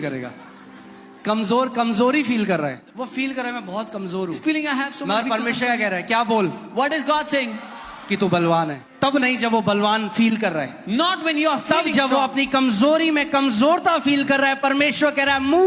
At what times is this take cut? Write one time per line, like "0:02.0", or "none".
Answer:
0:02.8
0:08.8